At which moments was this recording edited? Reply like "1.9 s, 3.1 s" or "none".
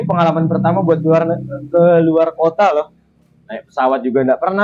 none